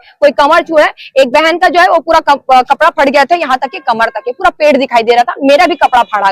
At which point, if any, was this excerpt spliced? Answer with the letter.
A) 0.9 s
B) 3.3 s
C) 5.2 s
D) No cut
D